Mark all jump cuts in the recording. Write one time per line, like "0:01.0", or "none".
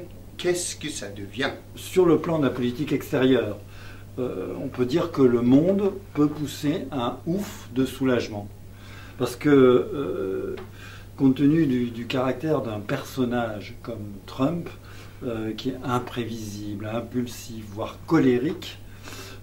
none